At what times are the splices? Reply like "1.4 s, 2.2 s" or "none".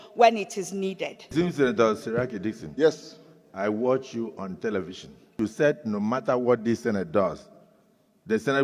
1.2 s, 5.4 s